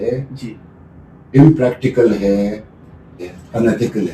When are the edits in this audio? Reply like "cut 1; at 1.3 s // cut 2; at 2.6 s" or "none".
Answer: cut 1; at 3.1 s